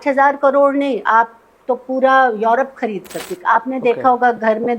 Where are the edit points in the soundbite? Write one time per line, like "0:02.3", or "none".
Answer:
0:03.2